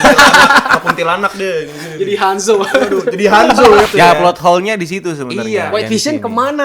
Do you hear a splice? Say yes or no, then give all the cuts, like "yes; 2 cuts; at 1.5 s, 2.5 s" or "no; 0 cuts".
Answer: yes; 1 cut; at 3.9 s